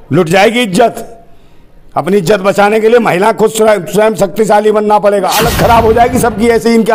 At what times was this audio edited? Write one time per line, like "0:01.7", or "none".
0:05.5